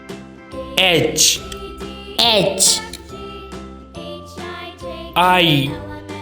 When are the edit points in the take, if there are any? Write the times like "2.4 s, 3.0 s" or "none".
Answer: 0.8 s, 3.2 s, 5.1 s